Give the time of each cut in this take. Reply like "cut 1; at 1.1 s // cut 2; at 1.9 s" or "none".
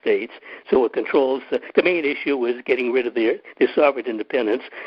none